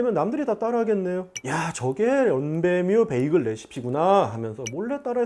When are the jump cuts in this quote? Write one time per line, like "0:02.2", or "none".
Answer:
0:01.4